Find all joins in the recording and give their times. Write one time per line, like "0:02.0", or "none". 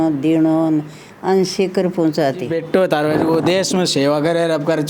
0:02.6